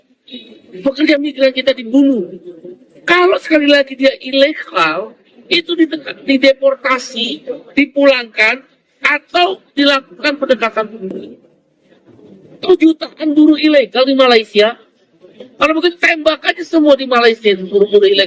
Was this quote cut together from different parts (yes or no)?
no